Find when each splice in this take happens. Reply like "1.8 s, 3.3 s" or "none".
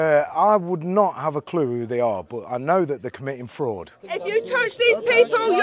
3.9 s